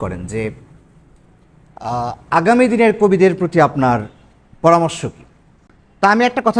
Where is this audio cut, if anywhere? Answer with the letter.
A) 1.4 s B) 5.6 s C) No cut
C